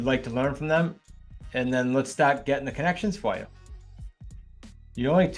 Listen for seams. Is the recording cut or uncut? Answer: uncut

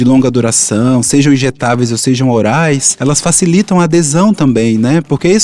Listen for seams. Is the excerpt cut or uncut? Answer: cut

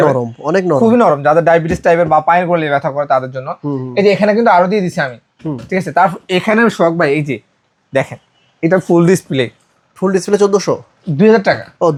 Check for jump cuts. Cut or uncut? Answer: uncut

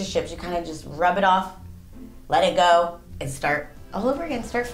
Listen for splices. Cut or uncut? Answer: cut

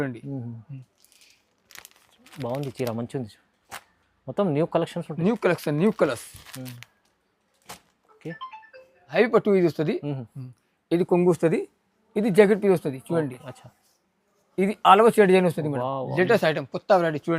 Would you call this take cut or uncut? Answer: cut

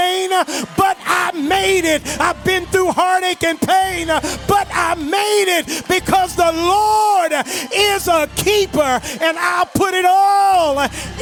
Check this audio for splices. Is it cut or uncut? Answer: uncut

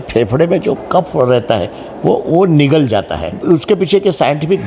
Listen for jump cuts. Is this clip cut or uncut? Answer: cut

